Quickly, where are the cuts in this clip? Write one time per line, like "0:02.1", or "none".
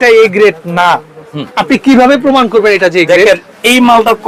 none